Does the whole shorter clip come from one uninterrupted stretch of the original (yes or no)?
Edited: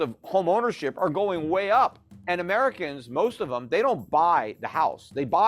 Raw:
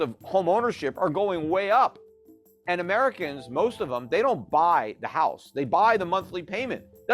no